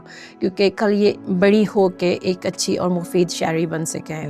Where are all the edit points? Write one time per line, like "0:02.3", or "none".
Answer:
0:01.2